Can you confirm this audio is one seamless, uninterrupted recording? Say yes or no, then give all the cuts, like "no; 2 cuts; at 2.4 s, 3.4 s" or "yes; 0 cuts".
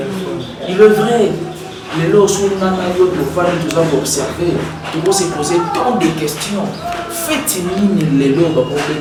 yes; 0 cuts